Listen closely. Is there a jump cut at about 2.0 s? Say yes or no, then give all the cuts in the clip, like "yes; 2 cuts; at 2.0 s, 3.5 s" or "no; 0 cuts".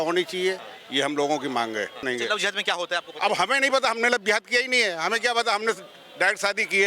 yes; 1 cut; at 2.0 s